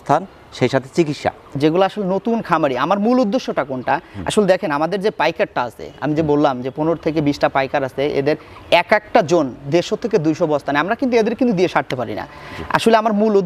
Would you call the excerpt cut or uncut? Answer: cut